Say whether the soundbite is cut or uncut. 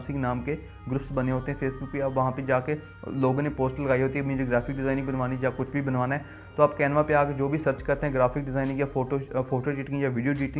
uncut